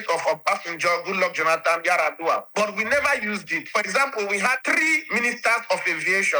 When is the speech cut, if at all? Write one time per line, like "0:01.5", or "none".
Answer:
0:03.6
0:04.6

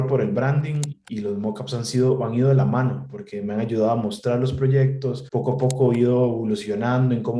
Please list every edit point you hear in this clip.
0:01.0
0:05.2

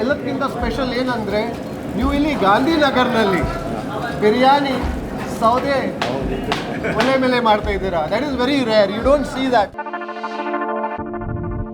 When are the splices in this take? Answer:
none

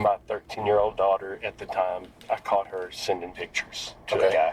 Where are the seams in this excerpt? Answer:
0:02.2

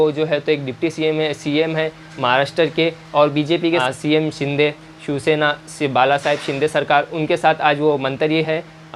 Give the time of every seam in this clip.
0:03.8

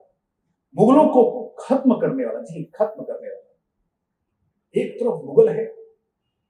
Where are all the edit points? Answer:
none

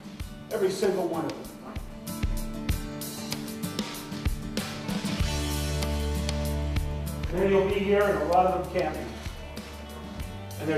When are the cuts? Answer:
none

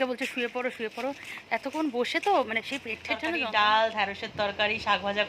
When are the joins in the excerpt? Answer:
0:03.4

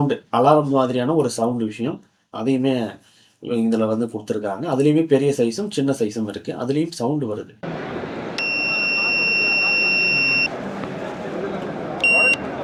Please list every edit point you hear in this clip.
none

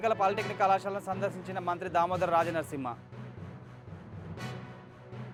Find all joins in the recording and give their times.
none

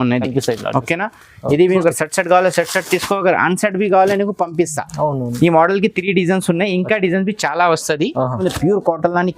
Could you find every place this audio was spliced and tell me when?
0:01.7
0:08.4

